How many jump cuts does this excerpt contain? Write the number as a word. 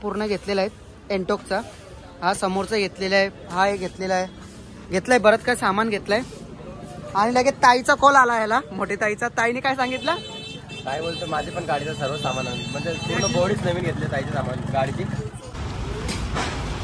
one